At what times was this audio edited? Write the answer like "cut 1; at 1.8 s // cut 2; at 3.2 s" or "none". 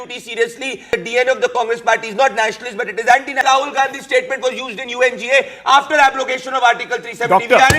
cut 1; at 0.9 s // cut 2; at 3.4 s